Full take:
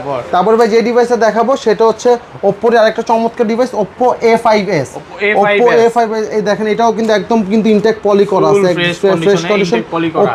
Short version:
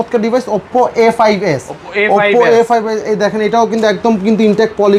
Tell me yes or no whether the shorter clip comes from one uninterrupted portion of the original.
yes